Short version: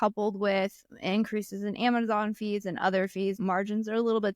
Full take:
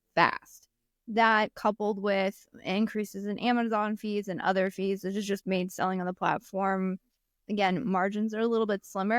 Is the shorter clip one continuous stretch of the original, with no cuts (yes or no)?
no